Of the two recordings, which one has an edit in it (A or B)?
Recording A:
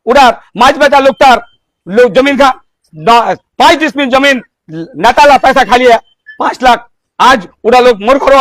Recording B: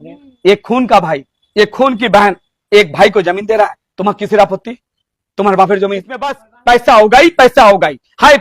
B